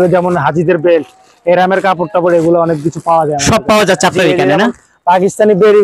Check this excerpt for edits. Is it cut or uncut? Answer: uncut